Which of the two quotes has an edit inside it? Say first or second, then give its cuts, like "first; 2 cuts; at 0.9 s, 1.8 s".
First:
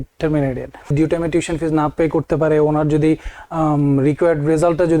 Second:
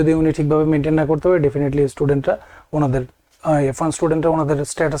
first; 1 cut; at 0.9 s